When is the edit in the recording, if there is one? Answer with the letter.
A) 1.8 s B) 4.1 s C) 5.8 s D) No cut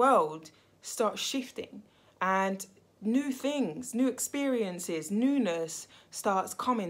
D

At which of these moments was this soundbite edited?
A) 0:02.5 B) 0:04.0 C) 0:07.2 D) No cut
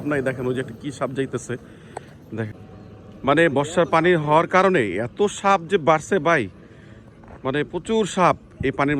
A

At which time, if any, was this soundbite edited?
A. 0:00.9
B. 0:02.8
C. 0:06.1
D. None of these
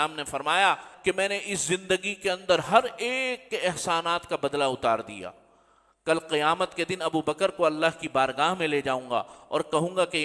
A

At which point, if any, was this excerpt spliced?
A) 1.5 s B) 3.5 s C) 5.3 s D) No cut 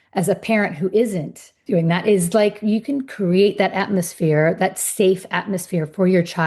A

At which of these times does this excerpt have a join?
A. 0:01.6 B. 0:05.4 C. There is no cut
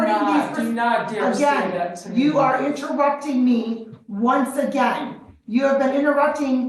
C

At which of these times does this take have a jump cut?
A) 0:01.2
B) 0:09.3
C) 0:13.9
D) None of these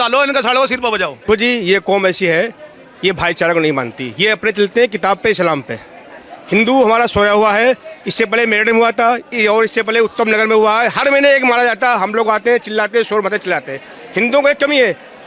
A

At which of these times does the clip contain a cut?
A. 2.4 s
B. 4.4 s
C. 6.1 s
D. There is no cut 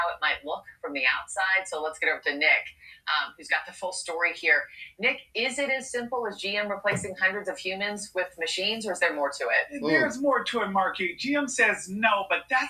A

